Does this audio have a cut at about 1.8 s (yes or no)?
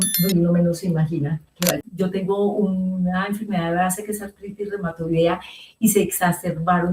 yes